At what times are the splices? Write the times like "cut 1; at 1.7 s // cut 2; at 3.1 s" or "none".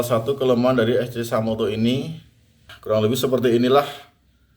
cut 1; at 2.7 s